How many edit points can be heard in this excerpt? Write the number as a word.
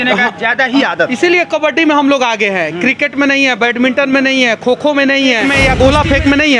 one